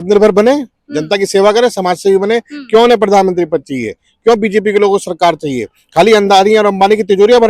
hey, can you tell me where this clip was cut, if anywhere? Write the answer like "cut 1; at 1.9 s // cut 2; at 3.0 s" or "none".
none